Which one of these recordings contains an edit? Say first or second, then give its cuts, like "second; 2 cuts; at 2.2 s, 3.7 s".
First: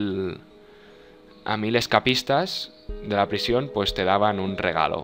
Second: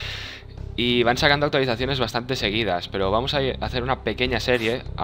first; 1 cut; at 2.2 s